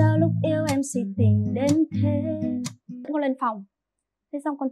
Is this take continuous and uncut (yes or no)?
no